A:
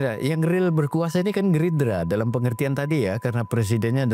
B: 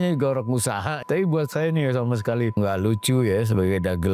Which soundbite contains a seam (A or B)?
B